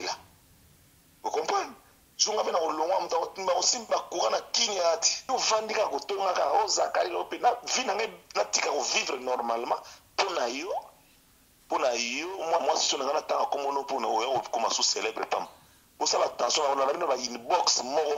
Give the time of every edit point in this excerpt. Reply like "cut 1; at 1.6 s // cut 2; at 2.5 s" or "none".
cut 1; at 5.3 s